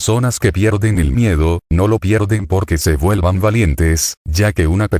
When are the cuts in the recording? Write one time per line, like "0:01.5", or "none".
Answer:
none